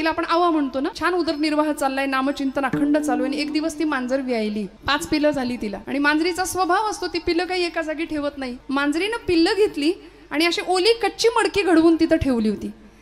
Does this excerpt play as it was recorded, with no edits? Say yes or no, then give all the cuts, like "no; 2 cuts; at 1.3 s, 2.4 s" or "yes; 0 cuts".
no; 4 cuts; at 1.0 s, 4.8 s, 5.8 s, 8.5 s